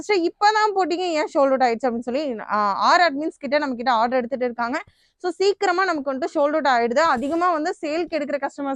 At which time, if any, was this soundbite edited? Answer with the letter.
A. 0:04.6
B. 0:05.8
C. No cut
C